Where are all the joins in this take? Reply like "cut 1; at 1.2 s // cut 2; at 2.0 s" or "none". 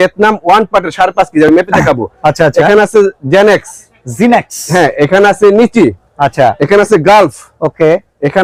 none